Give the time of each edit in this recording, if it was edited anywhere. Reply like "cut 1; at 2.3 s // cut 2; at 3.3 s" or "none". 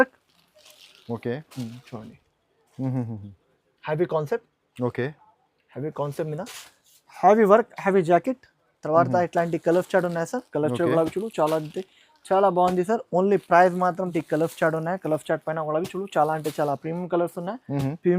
cut 1; at 14.1 s